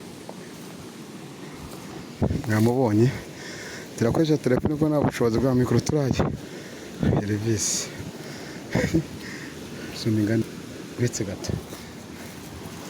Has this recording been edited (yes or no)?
yes